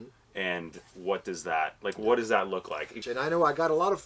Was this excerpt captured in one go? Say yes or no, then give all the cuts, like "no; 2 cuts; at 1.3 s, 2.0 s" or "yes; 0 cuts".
no; 1 cut; at 3.0 s